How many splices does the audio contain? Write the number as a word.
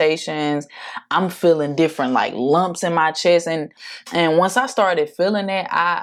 zero